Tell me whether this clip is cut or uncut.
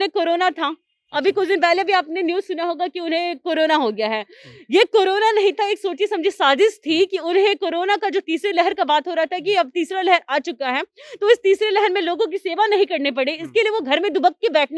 uncut